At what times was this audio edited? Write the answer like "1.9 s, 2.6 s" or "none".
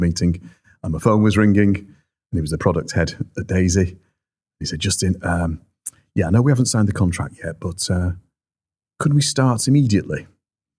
none